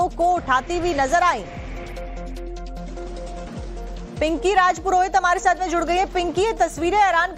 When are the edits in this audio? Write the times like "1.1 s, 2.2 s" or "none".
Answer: none